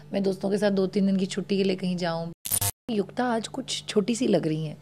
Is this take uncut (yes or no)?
no